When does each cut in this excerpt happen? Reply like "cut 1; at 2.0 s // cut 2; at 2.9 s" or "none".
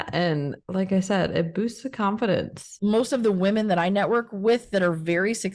cut 1; at 2.7 s